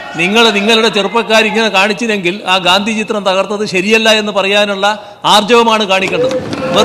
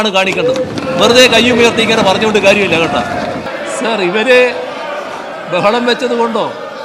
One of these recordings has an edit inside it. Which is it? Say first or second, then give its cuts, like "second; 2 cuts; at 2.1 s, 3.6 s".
second; 1 cut; at 3.5 s